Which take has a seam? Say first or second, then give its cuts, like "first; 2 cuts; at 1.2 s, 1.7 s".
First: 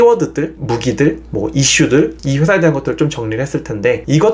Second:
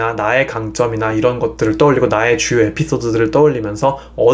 first; 1 cut; at 2.2 s